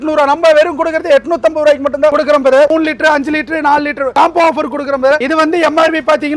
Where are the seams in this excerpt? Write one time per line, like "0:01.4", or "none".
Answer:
0:02.7
0:04.1
0:05.2